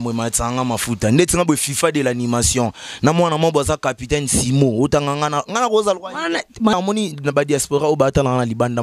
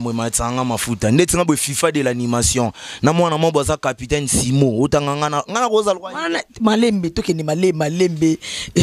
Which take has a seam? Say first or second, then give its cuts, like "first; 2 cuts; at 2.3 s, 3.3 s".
first; 1 cut; at 6.7 s